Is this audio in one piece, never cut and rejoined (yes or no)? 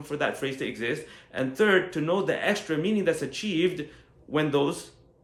yes